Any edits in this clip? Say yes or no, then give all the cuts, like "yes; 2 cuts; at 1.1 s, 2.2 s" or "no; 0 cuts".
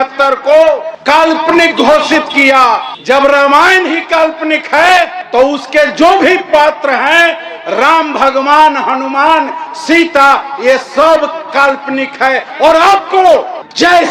no; 0 cuts